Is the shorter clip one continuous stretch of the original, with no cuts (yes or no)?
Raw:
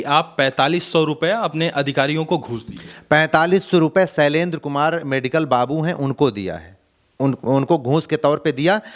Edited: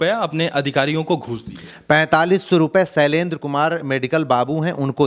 yes